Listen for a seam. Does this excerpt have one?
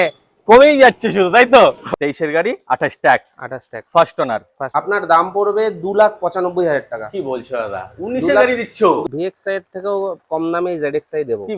yes; 3 cuts; at 1.8 s, 4.6 s, 9.0 s

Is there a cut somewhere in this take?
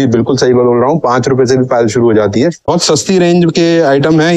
yes; 1 cut; at 2.7 s

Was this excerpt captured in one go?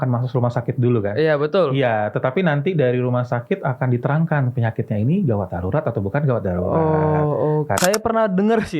no; 1 cut; at 7.7 s

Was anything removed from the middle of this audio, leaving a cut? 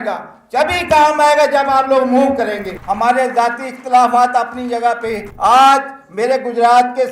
yes; 2 cuts; at 2.7 s, 5.3 s

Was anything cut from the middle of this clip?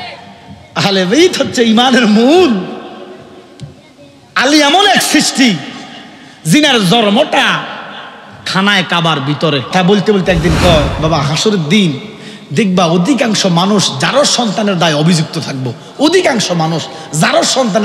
yes; 1 cut; at 9.7 s

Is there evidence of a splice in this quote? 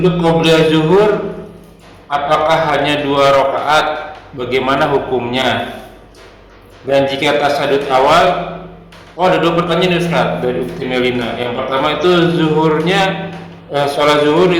no; 0 cuts

